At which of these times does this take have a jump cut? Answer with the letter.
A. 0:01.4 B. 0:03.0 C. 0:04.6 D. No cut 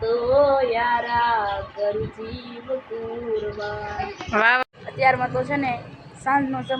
C